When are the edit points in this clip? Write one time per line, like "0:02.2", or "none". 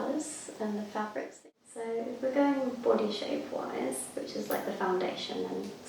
0:01.4